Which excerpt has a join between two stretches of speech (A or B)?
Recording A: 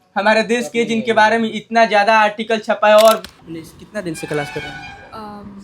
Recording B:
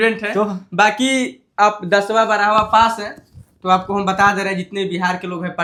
A